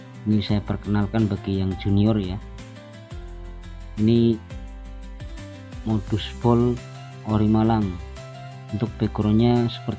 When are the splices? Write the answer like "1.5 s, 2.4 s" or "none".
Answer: none